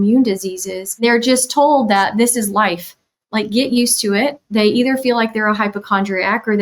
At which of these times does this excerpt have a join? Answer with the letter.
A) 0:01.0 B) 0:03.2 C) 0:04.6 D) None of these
A